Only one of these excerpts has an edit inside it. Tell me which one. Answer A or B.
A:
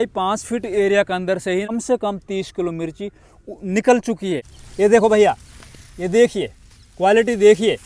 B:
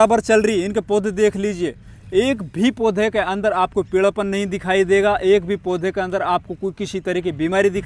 A